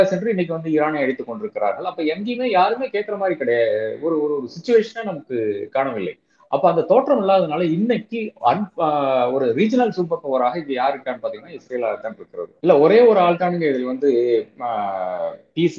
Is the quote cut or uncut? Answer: cut